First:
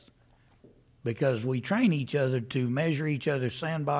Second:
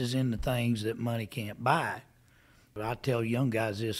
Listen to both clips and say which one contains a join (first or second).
second